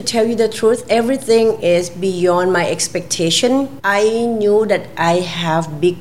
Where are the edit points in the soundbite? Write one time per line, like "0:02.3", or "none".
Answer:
0:03.8